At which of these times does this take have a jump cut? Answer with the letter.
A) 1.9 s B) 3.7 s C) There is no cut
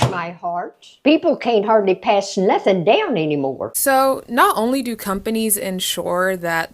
B